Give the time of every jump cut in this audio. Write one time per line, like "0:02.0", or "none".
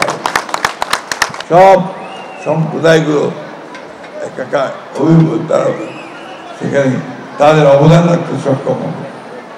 0:01.4